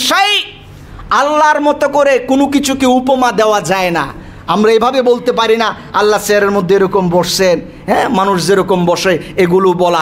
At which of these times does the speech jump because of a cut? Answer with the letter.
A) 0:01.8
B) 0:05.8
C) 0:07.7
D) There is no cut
D